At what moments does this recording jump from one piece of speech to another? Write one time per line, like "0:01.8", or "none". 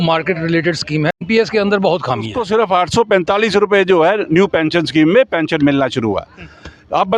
0:01.2
0:02.4